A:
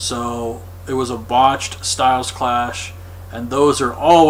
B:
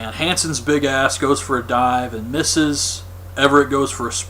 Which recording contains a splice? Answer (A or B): B